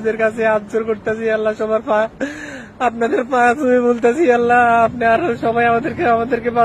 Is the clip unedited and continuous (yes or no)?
yes